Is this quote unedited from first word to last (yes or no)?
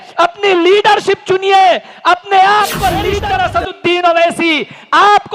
no